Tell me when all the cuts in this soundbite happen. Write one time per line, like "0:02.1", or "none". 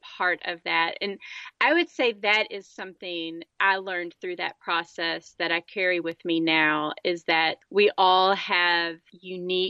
none